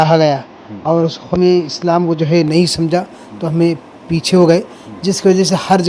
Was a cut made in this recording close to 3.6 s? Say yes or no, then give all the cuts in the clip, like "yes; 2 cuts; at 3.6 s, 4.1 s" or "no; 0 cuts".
no; 1 cut; at 1.4 s